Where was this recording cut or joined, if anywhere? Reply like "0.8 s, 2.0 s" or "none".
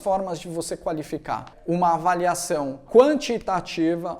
1.5 s, 2.8 s